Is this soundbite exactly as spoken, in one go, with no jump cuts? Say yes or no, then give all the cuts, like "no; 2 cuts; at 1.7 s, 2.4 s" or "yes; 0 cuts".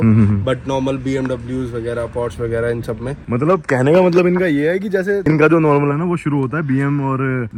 yes; 0 cuts